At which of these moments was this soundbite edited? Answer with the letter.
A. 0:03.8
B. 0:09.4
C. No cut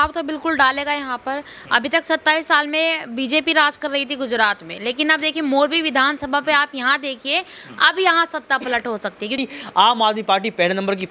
B